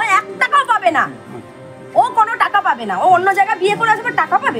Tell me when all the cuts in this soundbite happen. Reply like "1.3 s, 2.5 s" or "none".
none